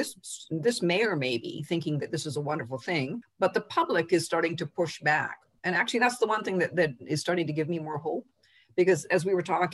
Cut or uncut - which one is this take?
uncut